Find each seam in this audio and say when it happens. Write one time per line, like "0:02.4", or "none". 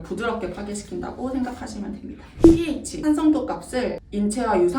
0:02.4